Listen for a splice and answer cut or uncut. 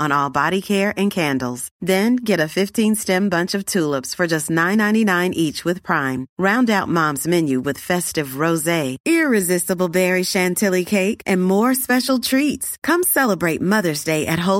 uncut